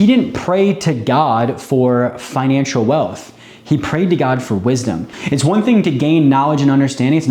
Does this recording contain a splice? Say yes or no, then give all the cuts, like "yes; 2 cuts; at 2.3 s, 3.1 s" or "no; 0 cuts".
yes; 1 cut; at 5.2 s